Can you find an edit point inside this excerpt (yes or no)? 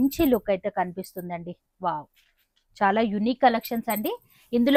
no